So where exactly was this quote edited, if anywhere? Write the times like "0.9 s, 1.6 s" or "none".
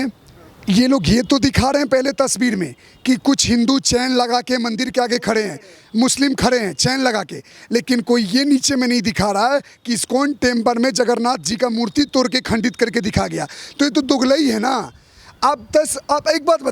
none

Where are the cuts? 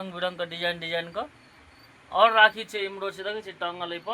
none

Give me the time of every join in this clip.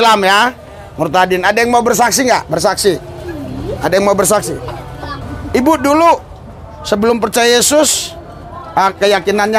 5.3 s

